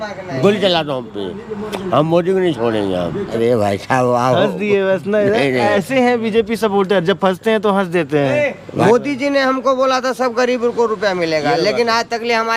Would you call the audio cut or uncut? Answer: cut